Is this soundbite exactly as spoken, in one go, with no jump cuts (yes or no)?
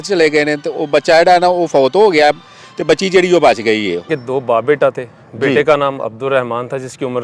no